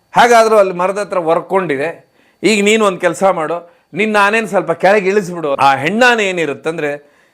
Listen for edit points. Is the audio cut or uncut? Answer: cut